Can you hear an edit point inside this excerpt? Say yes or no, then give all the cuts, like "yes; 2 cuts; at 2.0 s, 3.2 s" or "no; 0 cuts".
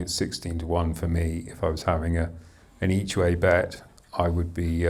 no; 0 cuts